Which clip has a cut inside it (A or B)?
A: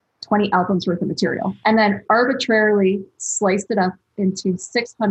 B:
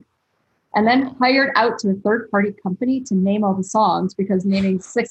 A